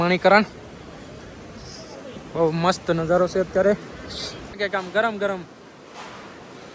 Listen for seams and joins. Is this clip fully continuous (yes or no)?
no